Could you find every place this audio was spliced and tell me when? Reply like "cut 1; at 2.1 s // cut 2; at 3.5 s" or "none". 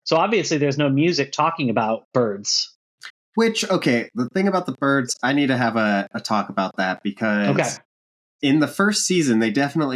none